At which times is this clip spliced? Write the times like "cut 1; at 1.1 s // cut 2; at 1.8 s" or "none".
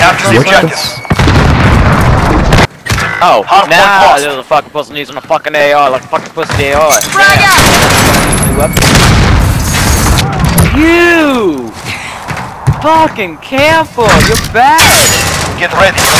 cut 1; at 2.7 s // cut 2; at 10.2 s